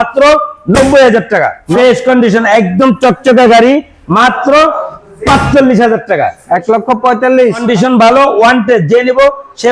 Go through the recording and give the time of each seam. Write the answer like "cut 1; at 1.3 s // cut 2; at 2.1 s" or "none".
cut 1; at 1.6 s // cut 2; at 7.6 s